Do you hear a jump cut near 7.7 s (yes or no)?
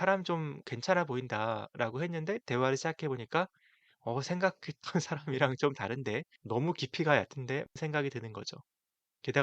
yes